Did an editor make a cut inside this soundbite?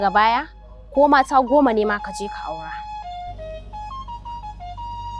no; 0 cuts

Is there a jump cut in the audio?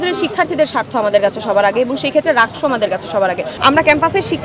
yes; 1 cut; at 3.5 s

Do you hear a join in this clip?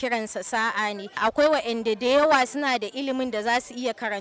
yes; 1 cut; at 1.2 s

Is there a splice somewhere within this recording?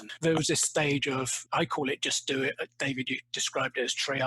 yes; 1 cut; at 1.4 s

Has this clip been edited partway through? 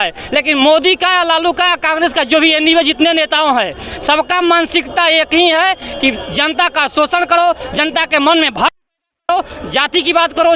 no; 0 cuts

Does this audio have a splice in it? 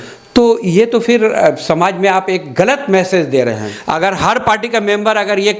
yes; 1 cut; at 3.7 s

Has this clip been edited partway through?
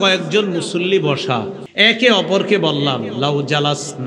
yes; 1 cut; at 1.6 s

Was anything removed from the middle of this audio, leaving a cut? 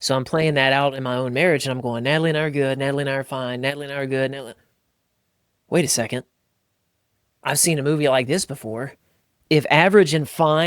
yes; 1 cut; at 9.3 s

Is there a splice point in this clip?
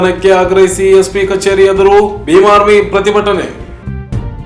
no; 0 cuts

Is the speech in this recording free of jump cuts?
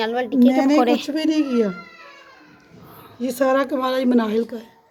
yes; 0 cuts

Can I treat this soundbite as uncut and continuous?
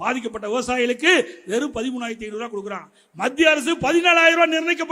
yes; 0 cuts

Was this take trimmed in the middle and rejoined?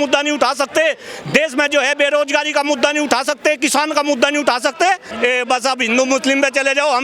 yes; 1 cut; at 5.1 s

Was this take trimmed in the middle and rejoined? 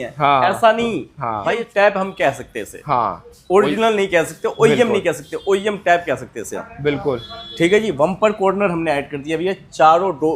yes; 1 cut; at 1.6 s

